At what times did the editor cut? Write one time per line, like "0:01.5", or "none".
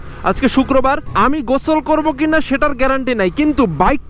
0:01.1